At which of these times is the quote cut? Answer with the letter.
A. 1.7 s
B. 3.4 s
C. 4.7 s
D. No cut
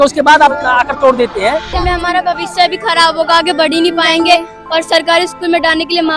A